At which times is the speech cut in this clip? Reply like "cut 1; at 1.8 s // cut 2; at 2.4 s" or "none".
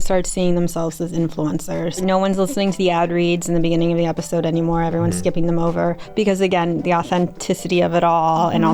cut 1; at 2.0 s // cut 2; at 6.0 s